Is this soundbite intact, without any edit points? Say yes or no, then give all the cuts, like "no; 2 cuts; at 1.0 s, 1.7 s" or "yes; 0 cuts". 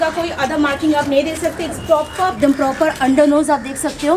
no; 1 cut; at 2.4 s